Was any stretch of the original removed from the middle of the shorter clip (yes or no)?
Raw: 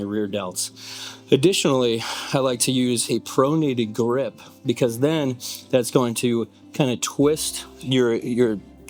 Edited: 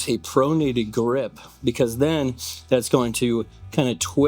no